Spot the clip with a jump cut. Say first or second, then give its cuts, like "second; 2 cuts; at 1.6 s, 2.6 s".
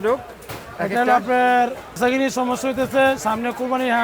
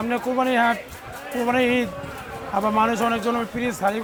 first; 1 cut; at 1.9 s